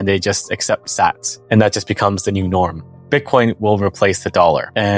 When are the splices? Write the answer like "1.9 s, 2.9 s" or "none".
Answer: 1.3 s, 2.9 s

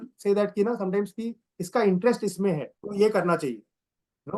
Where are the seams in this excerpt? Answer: 2.8 s

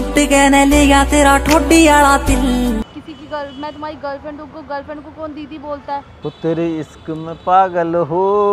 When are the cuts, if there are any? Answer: 2.9 s, 6.1 s

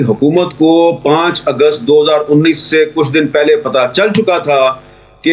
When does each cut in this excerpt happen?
none

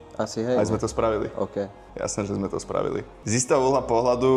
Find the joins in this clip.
3.2 s

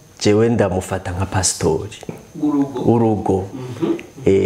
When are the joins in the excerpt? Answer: none

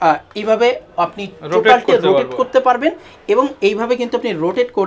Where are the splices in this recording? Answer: none

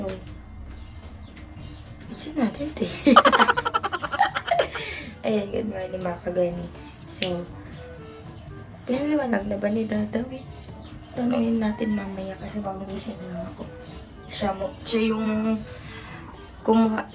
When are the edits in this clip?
none

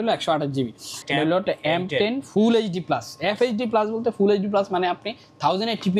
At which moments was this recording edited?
0.9 s

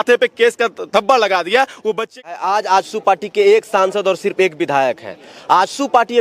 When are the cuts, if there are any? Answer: 2.3 s

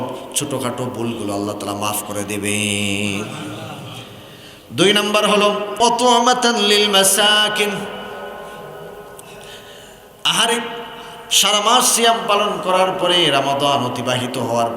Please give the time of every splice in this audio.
5.8 s

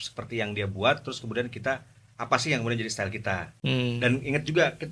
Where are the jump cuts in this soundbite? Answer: 3.5 s

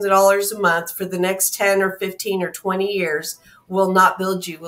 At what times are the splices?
none

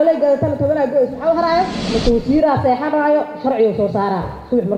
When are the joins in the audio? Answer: 1.8 s

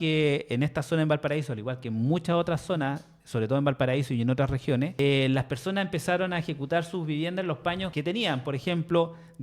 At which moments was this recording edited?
4.9 s, 7.9 s

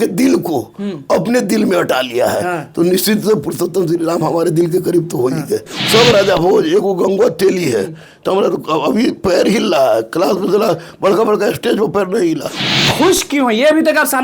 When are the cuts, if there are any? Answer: 5.8 s, 12.7 s

